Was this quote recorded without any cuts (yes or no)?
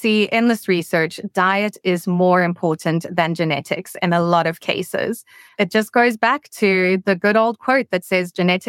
no